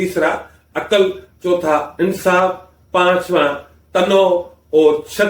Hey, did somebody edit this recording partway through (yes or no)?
no